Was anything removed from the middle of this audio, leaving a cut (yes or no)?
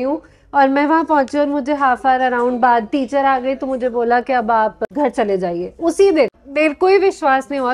yes